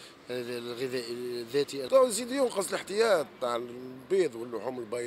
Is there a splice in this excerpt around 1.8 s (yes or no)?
yes